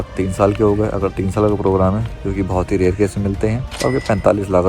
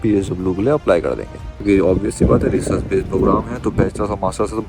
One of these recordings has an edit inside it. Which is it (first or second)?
second